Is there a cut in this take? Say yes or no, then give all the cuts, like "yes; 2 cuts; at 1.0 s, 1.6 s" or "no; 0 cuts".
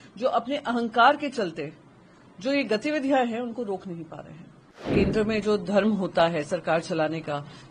yes; 1 cut; at 4.9 s